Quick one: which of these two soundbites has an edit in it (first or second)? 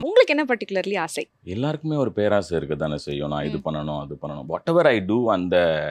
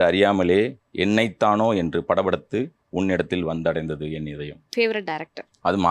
second